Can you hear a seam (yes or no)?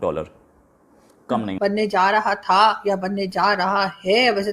yes